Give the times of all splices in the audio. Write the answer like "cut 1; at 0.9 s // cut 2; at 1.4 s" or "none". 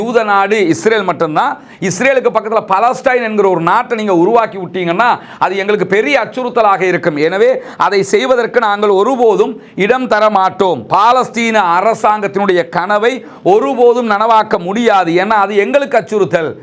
none